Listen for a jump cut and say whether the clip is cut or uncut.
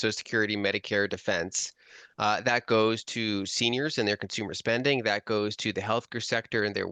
uncut